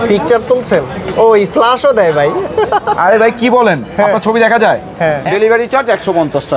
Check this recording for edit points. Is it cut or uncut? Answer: cut